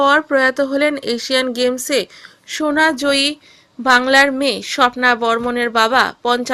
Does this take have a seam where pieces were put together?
no; 0 cuts

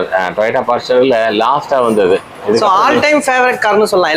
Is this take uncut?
yes; 0 cuts

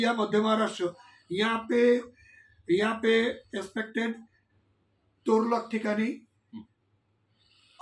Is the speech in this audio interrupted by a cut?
no; 0 cuts

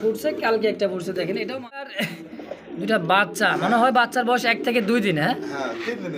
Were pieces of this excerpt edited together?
yes; 1 cut; at 1.9 s

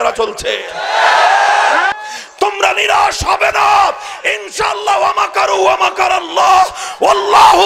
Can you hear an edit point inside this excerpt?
yes; 1 cut; at 1.9 s

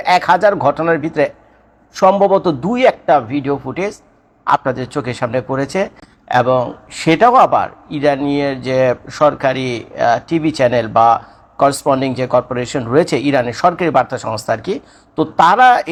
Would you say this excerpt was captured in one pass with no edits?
yes; 0 cuts

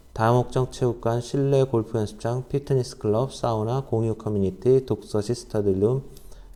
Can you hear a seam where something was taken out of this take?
no; 0 cuts

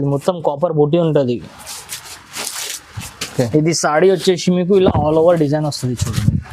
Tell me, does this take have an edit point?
no; 0 cuts

